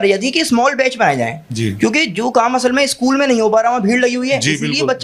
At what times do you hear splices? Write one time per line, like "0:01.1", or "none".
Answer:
none